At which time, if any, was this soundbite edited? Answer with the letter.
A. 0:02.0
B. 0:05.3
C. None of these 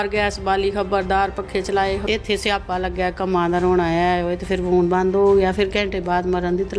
A